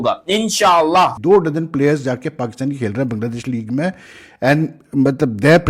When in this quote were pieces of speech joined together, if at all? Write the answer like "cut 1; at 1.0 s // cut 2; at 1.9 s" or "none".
cut 1; at 1.2 s